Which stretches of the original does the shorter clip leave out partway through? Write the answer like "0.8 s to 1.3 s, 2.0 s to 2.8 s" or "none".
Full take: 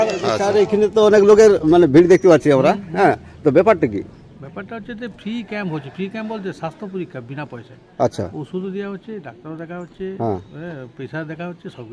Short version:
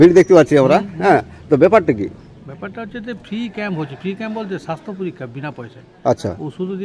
none